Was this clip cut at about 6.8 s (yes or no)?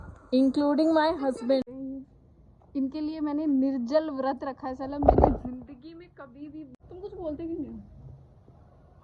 yes